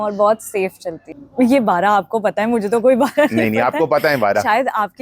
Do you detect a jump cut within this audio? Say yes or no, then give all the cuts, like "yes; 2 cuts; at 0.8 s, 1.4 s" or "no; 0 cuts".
yes; 1 cut; at 1.0 s